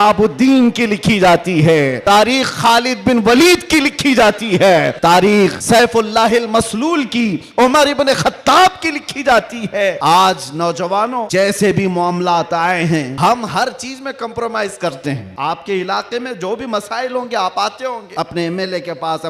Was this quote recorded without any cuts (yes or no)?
no